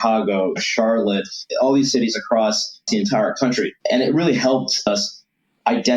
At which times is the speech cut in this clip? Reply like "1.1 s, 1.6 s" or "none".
1.4 s, 2.9 s, 3.8 s, 4.9 s